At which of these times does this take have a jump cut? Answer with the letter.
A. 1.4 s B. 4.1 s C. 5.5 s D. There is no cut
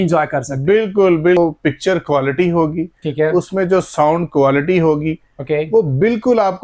A